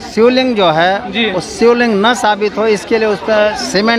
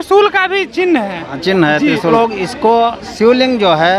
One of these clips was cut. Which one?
second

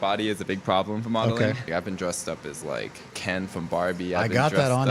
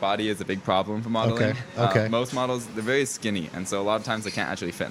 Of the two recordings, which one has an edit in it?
first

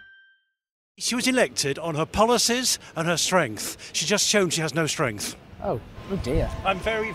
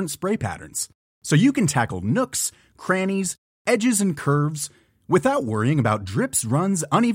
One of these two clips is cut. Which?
first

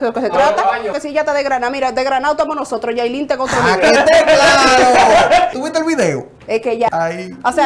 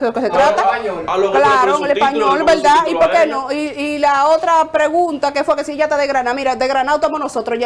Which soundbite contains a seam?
first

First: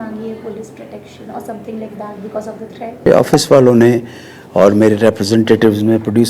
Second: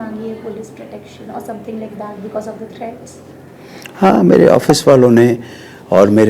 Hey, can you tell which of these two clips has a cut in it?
first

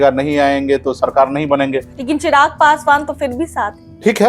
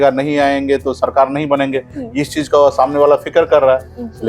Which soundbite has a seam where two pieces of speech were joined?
first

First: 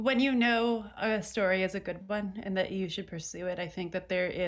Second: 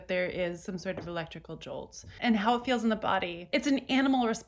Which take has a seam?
second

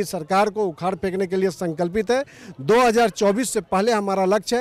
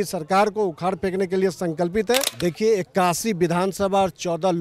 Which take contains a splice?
second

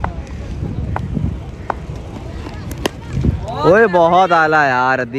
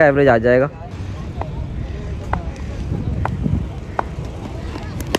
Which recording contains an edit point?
second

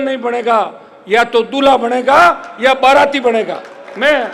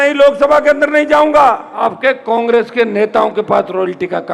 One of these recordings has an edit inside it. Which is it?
second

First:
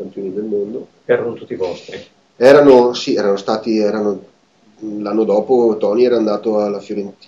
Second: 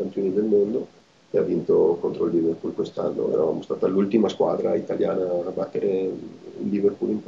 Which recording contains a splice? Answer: second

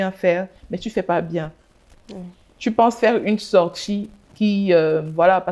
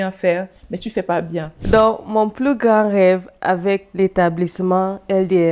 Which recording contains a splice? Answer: second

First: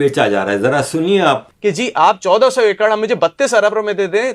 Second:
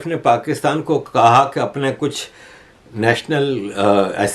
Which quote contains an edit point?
first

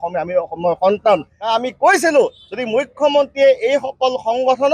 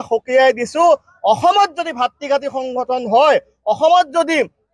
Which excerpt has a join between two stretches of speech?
first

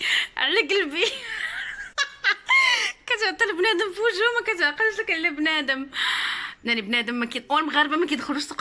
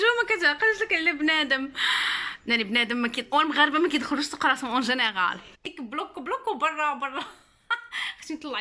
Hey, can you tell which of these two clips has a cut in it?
second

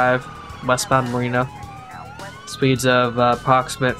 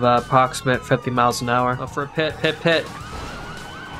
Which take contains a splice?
second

